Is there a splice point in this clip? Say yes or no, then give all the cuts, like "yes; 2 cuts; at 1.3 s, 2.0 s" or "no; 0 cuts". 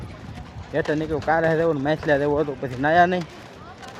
no; 0 cuts